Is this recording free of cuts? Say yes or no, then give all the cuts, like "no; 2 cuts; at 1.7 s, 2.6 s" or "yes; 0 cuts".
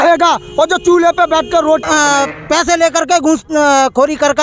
no; 1 cut; at 1.8 s